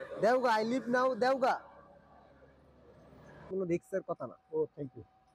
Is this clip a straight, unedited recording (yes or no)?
no